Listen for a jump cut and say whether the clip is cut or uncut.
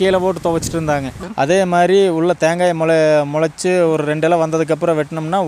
cut